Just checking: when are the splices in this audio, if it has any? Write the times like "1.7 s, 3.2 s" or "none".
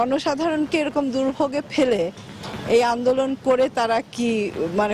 none